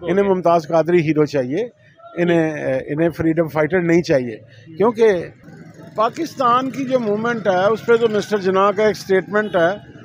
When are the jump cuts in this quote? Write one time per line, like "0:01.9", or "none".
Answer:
none